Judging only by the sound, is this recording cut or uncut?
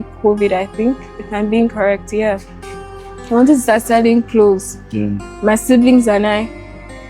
uncut